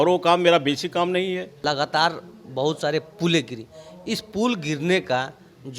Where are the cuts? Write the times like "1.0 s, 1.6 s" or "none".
1.5 s